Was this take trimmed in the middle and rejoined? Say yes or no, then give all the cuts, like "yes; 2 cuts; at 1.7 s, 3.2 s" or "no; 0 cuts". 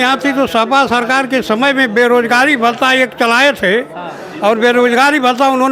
no; 0 cuts